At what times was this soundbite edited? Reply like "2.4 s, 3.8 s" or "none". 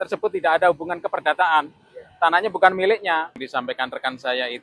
3.3 s